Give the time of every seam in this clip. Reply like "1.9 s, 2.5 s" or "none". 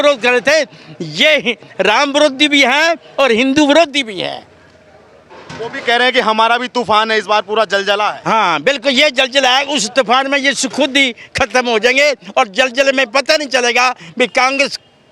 none